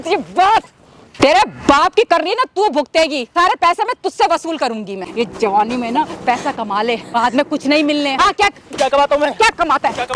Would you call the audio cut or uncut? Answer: cut